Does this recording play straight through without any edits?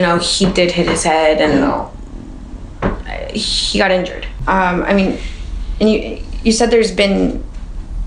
no; 1 cut; at 4.4 s

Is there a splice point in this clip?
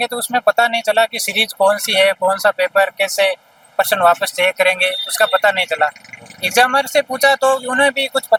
no; 0 cuts

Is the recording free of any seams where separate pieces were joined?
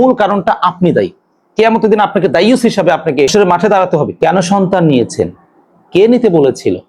no; 2 cuts; at 3.3 s, 4.1 s

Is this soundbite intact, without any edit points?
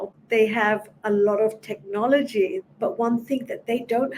no; 1 cut; at 2.6 s

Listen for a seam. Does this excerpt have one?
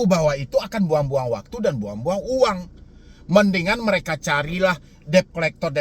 no; 0 cuts

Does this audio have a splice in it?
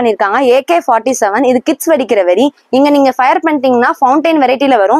no; 0 cuts

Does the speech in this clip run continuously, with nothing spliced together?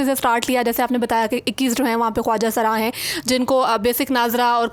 yes; 0 cuts

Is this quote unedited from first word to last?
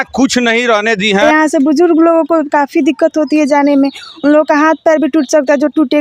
no; 1 cut; at 1.2 s

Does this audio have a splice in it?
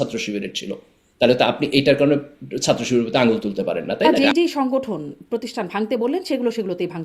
yes; 1 cut; at 4.1 s

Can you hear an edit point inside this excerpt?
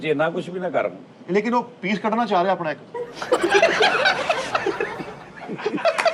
no; 0 cuts

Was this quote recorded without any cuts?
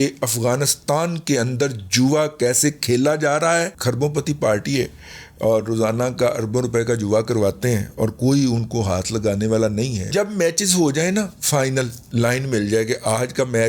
no; 3 cuts; at 3.7 s, 10.1 s, 12.1 s

